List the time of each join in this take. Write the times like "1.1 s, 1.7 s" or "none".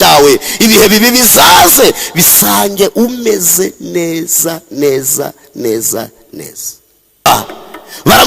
7.3 s